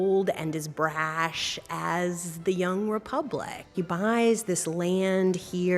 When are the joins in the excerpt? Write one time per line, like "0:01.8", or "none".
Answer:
0:03.7